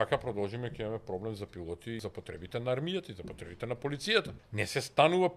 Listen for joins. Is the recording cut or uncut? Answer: cut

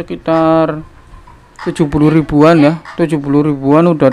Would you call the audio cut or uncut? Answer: uncut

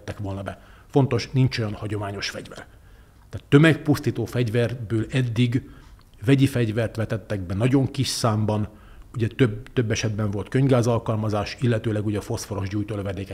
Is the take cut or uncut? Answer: uncut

